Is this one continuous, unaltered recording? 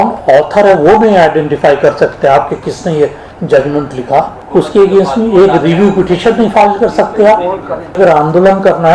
no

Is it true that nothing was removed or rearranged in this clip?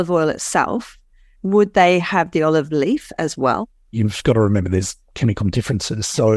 no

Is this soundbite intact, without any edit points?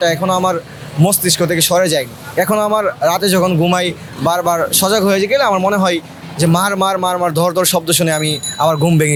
yes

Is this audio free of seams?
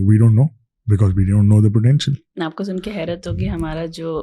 yes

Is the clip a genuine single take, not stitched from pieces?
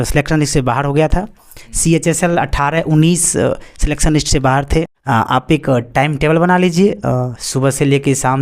no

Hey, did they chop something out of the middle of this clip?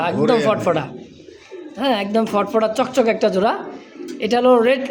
no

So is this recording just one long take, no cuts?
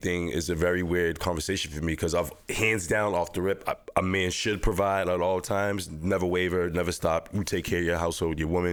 yes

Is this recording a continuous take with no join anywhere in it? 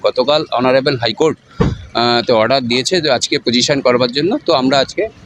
yes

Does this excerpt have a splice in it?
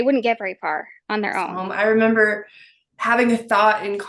yes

